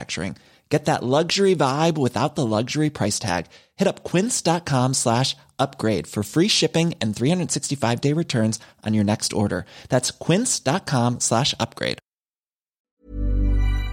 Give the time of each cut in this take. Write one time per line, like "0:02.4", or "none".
0:12.9